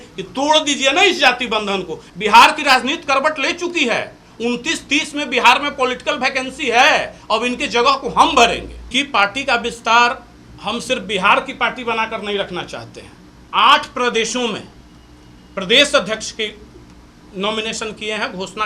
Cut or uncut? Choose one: cut